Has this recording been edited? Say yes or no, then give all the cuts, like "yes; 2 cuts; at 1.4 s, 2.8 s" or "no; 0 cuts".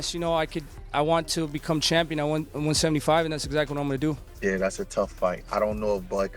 yes; 1 cut; at 3.9 s